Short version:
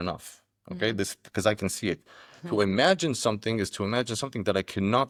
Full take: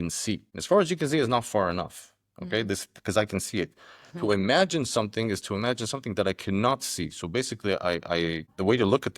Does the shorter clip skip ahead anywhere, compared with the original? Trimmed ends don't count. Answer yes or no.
no